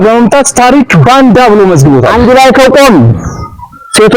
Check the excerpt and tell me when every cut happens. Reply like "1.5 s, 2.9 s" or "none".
2.1 s